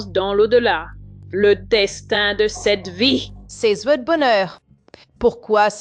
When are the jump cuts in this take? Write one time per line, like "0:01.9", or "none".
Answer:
none